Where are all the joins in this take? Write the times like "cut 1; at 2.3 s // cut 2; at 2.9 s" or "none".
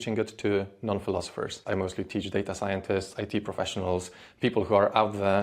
cut 1; at 1.6 s